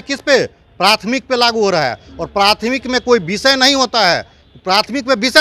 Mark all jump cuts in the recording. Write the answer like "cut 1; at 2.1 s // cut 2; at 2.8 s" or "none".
none